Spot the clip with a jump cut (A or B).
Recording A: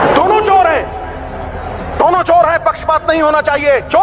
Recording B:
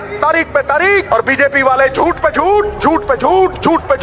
B